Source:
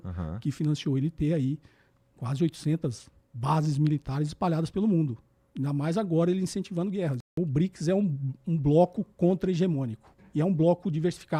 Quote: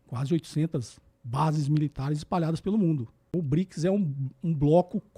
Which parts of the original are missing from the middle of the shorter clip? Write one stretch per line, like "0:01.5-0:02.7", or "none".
0:05.3-0:07.2

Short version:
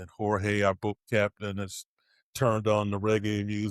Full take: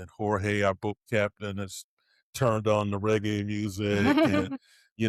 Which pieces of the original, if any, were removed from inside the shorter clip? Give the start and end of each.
none

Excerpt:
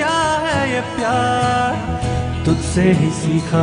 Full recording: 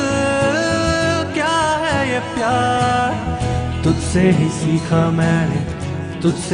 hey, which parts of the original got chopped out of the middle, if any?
none

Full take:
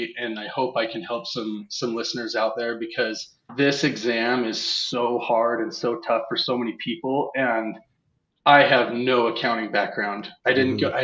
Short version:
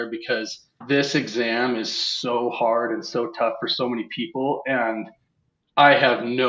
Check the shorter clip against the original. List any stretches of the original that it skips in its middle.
none

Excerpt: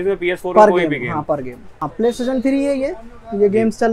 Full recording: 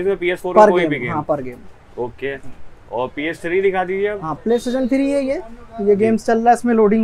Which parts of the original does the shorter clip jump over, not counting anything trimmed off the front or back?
0:01.8-0:04.3

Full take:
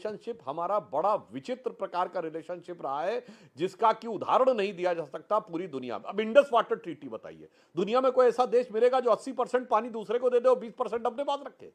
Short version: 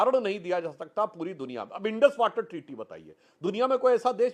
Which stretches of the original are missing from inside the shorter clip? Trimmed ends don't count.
none

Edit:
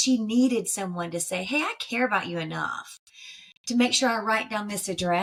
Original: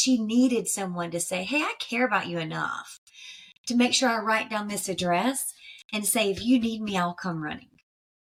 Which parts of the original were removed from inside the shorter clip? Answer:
none

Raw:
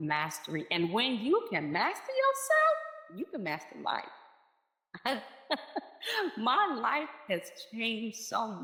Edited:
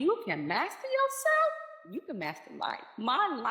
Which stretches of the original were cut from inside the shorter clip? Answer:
0:03.6-0:05.8

